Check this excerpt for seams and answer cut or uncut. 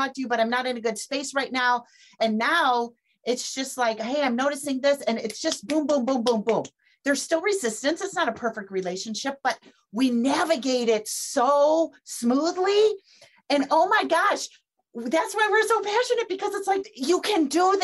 cut